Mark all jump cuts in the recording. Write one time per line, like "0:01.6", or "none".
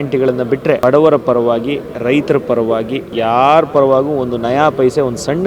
0:00.8
0:03.1